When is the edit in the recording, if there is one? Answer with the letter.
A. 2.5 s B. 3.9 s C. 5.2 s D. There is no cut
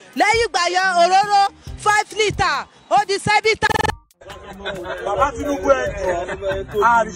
B